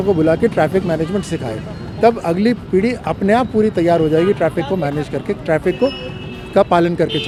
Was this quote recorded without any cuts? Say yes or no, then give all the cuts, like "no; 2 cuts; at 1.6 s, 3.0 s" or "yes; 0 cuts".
yes; 0 cuts